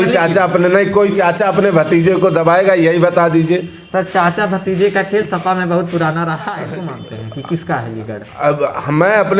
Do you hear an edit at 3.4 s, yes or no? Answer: no